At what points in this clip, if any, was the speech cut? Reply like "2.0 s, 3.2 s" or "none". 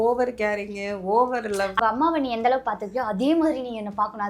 1.7 s